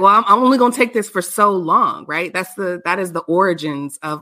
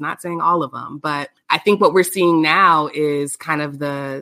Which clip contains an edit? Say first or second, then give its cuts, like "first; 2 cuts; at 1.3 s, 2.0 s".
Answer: second; 1 cut; at 1.3 s